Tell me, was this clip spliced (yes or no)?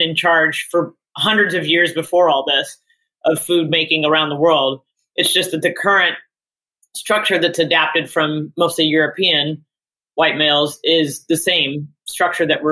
no